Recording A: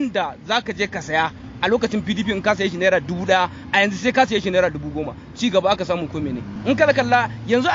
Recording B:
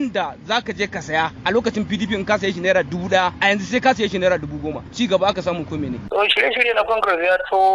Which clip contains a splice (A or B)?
B